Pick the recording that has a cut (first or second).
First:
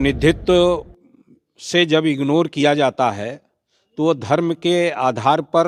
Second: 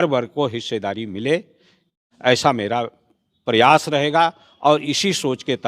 second